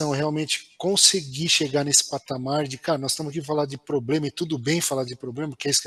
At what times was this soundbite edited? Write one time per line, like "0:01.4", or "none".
none